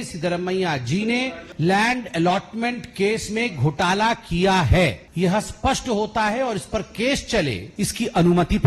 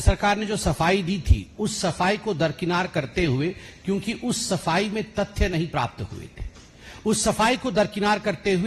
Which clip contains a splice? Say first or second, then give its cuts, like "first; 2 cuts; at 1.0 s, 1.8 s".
first; 3 cuts; at 1.4 s, 5.0 s, 7.6 s